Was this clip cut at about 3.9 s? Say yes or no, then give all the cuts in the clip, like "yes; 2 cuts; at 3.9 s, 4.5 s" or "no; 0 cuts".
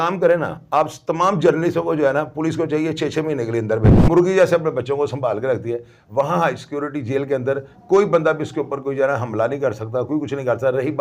yes; 1 cut; at 3.9 s